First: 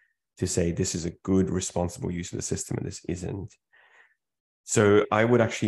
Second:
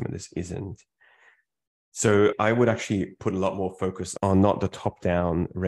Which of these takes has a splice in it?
second; 1 cut; at 4.2 s

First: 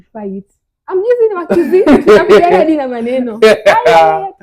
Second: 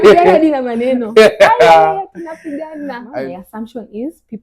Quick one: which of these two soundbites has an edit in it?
second; 1 cut; at 3.1 s

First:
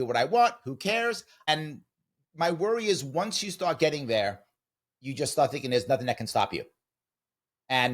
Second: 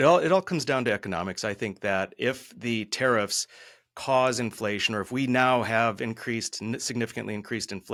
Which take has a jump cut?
first; 1 cut; at 1.3 s

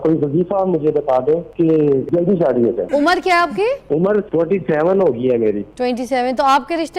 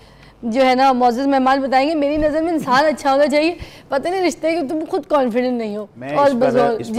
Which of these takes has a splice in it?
first; 4 cuts; at 1.9 s, 2.8 s, 4.1 s, 5.7 s

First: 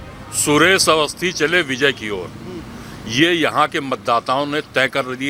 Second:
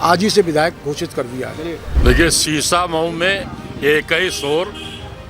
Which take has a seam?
second; 1 cut; at 1.8 s

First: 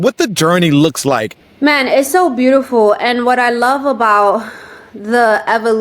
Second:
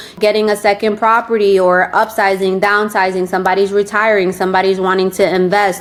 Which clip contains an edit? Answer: first; 1 cut; at 1.4 s

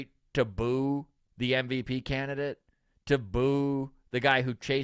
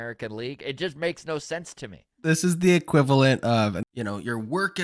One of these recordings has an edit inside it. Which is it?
second; 2 cuts; at 2.1 s, 3.8 s

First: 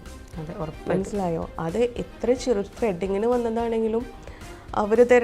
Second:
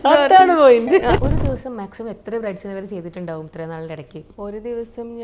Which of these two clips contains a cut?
second; 2 cuts; at 1.2 s, 4.2 s

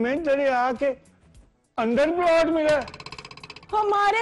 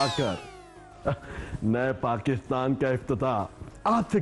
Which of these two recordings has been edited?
first; 1 cut; at 2.7 s

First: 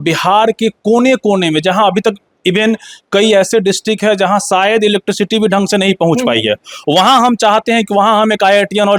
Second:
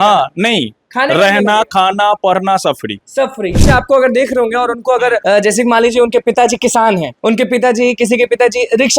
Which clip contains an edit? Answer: second; 3 cuts; at 3.6 s, 5.2 s, 7.1 s

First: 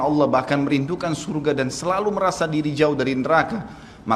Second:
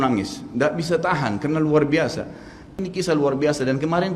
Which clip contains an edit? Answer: second; 1 cut; at 2.8 s

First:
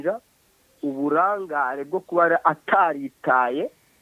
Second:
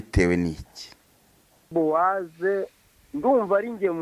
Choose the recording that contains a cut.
second; 1 cut; at 1.7 s

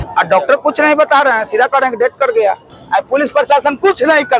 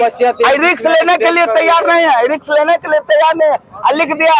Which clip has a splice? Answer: first; 1 cut; at 2.7 s

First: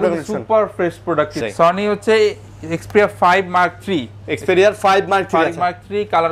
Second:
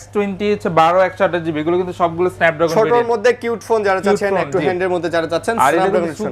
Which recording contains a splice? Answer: first; 1 cut; at 1.3 s

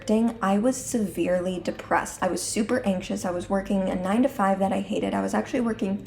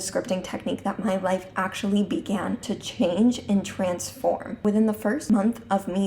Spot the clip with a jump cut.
second; 3 cuts; at 2.7 s, 4.5 s, 5.2 s

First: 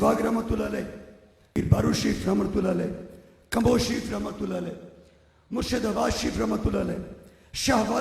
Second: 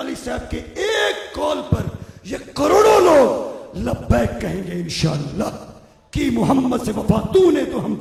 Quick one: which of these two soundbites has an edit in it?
first; 1 cut; at 1.6 s

